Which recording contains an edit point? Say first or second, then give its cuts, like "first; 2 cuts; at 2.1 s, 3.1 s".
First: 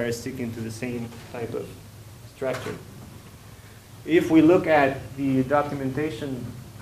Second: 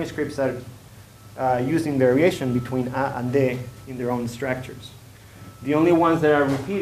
first; 1 cut; at 1.8 s